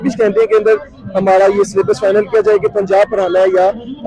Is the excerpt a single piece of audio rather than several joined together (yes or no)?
yes